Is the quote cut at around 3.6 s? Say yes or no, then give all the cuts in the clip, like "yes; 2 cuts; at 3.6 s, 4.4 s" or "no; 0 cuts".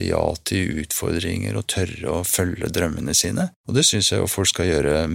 yes; 1 cut; at 3.6 s